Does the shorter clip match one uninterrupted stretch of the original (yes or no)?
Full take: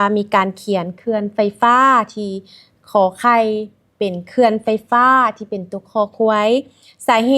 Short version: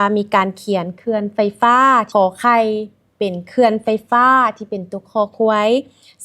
no